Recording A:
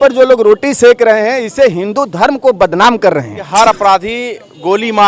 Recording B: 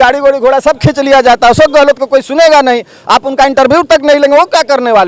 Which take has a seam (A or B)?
A